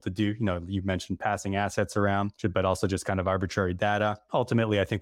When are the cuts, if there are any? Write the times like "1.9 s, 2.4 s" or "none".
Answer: 2.3 s, 4.2 s